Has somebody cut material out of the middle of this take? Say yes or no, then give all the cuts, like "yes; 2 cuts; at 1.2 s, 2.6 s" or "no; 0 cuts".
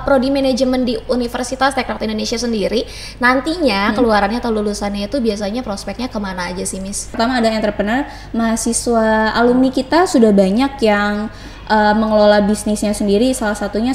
yes; 1 cut; at 7.1 s